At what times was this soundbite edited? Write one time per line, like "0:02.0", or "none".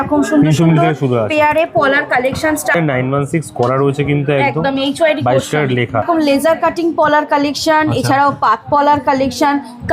0:02.7
0:06.1